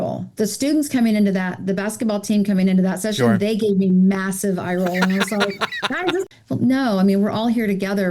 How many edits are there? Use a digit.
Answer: 1